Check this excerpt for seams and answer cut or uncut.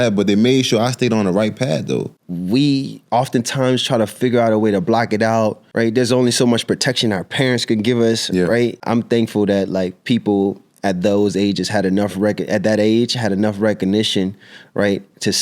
cut